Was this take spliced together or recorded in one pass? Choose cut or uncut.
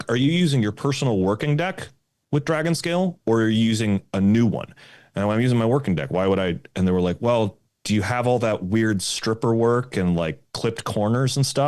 uncut